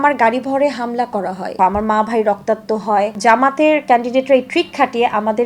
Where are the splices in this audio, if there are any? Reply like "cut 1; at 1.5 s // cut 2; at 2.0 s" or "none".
cut 1; at 1.6 s // cut 2; at 3.2 s